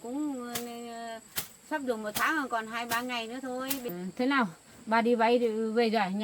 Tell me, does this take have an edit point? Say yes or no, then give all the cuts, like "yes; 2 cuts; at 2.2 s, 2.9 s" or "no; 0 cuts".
yes; 1 cut; at 3.9 s